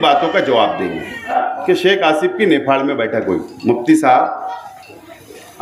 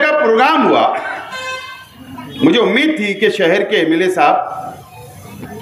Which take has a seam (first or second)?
first